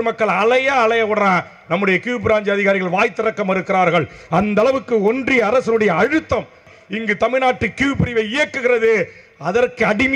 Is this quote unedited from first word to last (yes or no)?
no